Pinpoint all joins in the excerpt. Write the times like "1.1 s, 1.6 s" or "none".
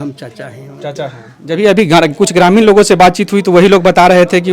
none